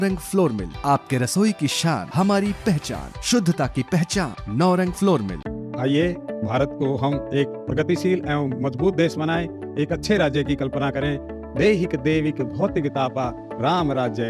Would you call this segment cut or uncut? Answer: uncut